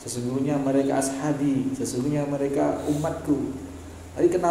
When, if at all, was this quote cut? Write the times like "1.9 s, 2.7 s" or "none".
none

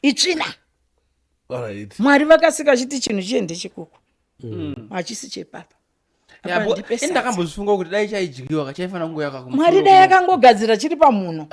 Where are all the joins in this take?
none

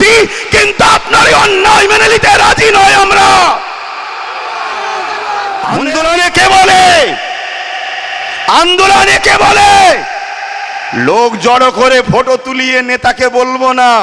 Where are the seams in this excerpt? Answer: 5.8 s

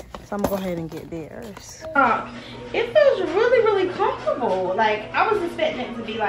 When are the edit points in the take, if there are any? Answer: 2.0 s

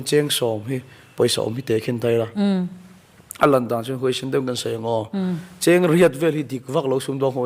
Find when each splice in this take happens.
none

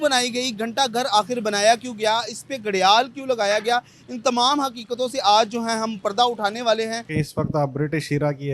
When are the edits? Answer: 7.0 s

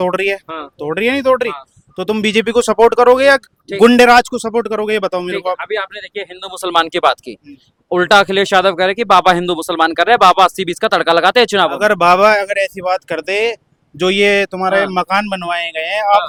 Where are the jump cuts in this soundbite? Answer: none

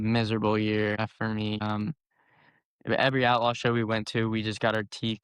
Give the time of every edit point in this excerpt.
1.0 s

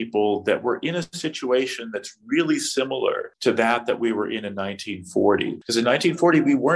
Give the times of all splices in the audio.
3.3 s, 5.6 s

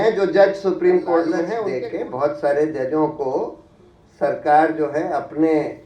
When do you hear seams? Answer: 1.4 s

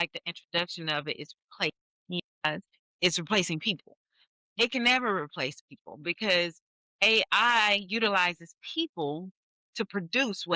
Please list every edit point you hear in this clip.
none

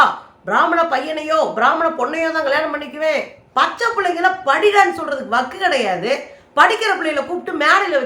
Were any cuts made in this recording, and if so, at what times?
3.4 s

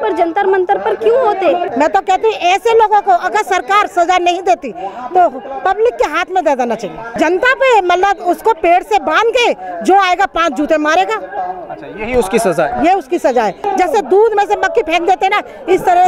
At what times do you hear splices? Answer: 1.7 s, 7.1 s, 13.6 s

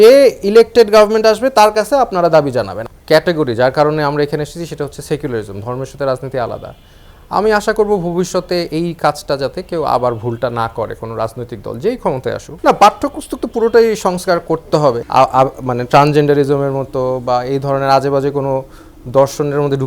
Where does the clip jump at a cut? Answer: 2.8 s, 12.5 s, 15.0 s

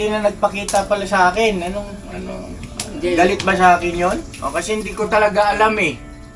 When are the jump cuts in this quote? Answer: 4.3 s

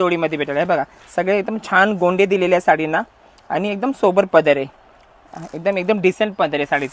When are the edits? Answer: none

